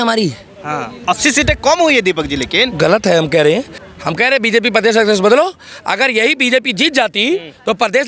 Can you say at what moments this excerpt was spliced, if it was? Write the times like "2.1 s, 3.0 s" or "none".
3.8 s